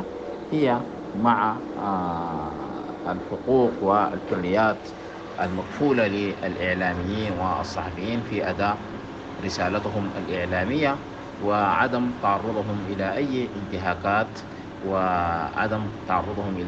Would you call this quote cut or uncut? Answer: uncut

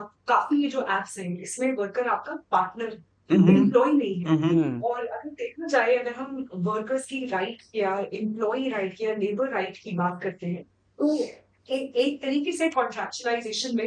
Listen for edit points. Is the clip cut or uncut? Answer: uncut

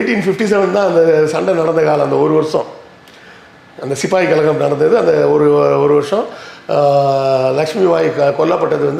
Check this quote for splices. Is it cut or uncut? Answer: uncut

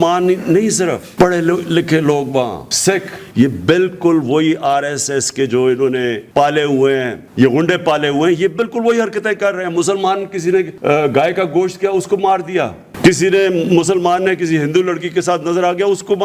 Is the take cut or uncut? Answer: cut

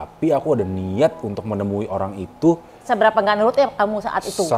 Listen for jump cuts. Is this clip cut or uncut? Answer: cut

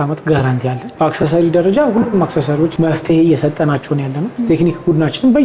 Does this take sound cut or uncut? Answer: cut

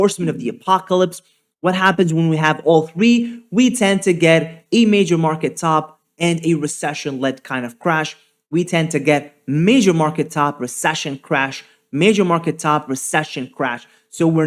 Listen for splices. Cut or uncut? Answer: uncut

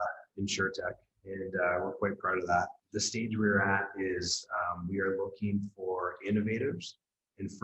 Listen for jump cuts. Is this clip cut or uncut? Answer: cut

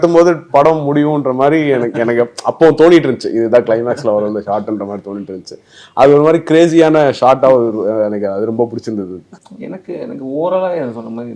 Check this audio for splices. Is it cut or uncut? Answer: uncut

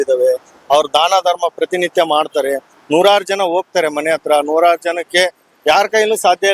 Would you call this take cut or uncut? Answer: uncut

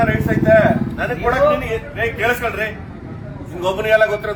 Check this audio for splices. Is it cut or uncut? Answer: uncut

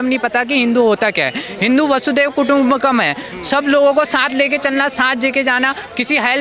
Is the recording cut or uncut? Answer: uncut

